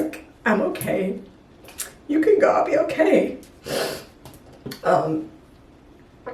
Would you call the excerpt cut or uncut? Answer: uncut